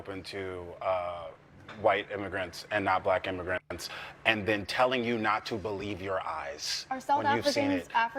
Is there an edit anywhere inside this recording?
no; 0 cuts

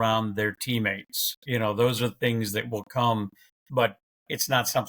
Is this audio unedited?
yes; 0 cuts

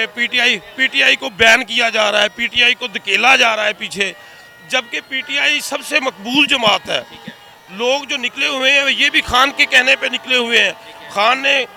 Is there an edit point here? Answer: no; 0 cuts

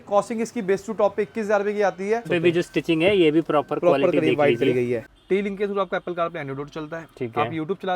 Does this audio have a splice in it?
yes; 2 cuts; at 2.3 s, 5.1 s

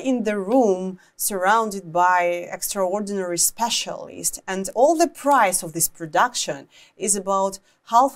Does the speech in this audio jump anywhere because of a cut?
no; 0 cuts

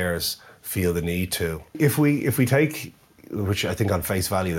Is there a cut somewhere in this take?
yes; 1 cut; at 1.7 s

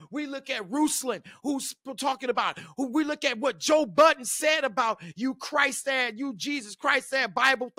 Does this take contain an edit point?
no; 0 cuts

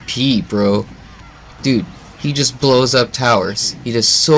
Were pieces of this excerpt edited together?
no; 0 cuts

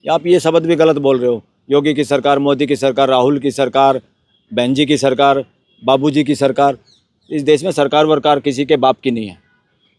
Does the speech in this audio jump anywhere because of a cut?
no; 0 cuts

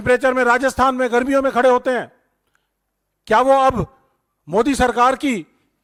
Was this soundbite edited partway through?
no; 0 cuts

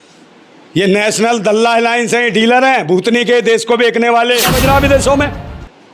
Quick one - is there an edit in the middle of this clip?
yes; 1 cut; at 4.5 s

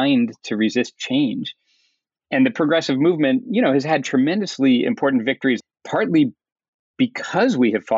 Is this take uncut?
no; 1 cut; at 5.6 s

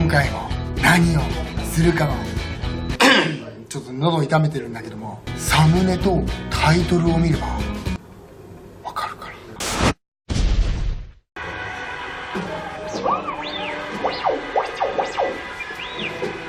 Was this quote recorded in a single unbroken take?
yes; 0 cuts

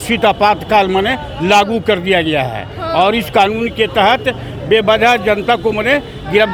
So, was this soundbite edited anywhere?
no; 0 cuts

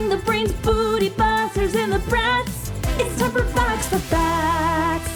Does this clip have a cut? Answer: no; 0 cuts

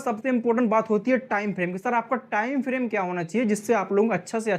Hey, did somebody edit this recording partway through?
no; 0 cuts

